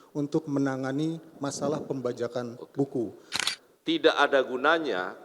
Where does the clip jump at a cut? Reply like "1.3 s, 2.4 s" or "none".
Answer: 3.3 s